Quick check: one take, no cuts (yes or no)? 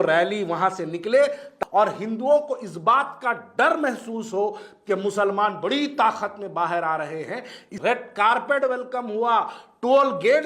no